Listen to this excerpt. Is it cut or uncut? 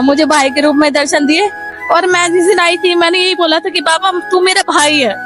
cut